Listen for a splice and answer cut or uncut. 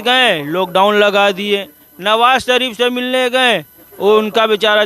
uncut